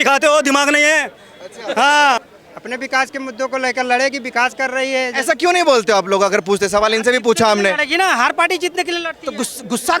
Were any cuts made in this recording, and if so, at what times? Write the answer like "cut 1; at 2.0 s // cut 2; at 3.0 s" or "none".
cut 1; at 2.3 s